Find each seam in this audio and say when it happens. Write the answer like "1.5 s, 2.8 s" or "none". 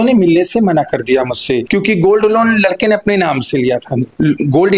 1.6 s